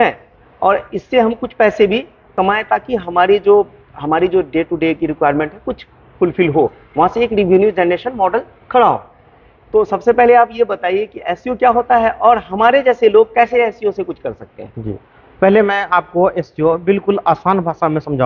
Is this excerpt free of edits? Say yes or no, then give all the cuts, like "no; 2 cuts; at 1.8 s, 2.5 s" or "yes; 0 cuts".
yes; 0 cuts